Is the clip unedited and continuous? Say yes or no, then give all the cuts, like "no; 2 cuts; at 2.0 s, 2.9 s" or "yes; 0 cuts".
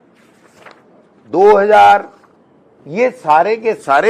yes; 0 cuts